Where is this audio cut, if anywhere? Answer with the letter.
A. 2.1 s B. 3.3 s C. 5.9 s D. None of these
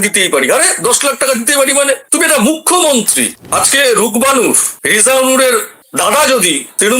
B